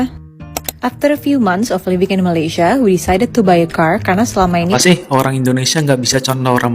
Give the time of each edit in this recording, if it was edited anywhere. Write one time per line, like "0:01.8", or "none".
0:04.7